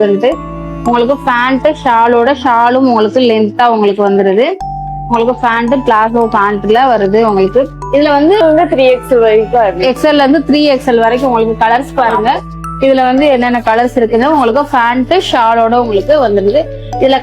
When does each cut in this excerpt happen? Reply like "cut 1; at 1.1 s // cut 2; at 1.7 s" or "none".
cut 1; at 8.4 s